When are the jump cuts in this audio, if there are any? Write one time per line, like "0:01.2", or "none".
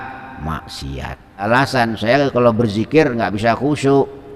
0:01.5